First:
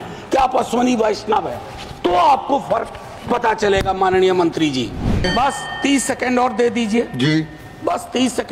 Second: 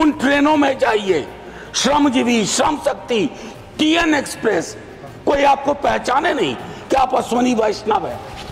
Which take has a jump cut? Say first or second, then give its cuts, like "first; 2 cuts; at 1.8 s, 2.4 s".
first; 1 cut; at 5.3 s